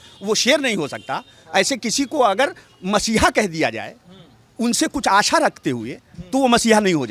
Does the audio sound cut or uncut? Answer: uncut